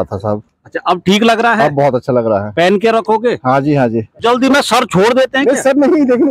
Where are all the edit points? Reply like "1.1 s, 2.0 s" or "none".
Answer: 4.1 s